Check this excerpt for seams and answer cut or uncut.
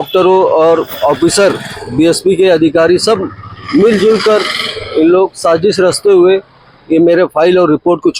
uncut